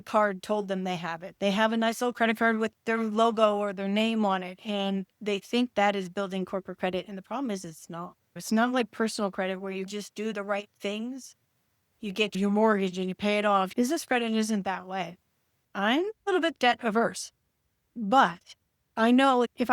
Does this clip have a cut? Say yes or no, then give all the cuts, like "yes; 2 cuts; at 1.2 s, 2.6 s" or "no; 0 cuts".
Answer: yes; 3 cuts; at 8.4 s, 13.7 s, 15.6 s